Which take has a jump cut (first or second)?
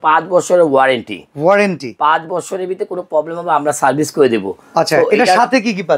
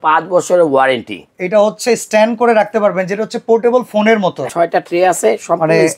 second